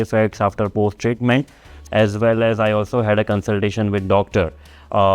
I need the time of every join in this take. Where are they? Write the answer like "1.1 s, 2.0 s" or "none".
1.7 s

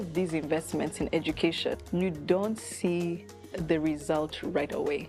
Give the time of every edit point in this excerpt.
1.8 s

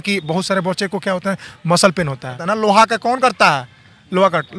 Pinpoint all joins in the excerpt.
2.4 s

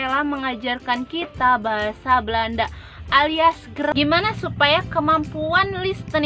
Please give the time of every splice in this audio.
3.9 s

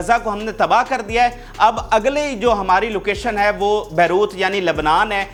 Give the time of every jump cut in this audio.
none

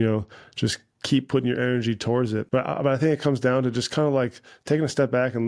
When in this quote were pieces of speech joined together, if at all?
2.5 s

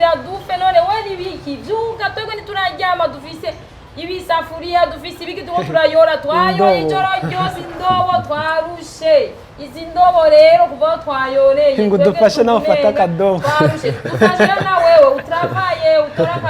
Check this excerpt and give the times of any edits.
none

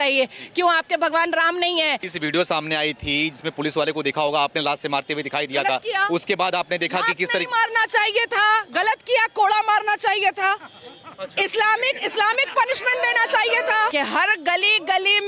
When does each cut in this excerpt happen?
2.1 s, 13.9 s

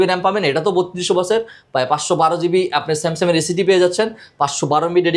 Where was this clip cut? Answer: none

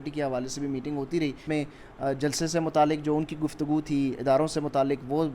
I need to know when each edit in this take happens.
1.4 s

